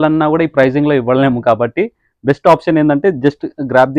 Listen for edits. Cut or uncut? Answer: uncut